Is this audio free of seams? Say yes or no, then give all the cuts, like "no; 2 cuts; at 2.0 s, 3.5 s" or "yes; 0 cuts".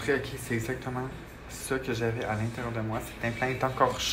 yes; 0 cuts